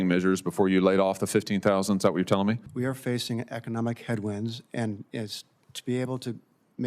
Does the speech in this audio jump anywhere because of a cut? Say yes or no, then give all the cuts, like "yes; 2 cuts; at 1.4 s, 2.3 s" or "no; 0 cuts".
yes; 1 cut; at 2.7 s